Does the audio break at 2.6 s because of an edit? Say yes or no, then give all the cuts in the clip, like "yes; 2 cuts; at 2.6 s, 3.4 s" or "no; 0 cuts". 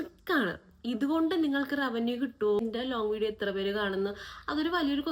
yes; 1 cut; at 2.6 s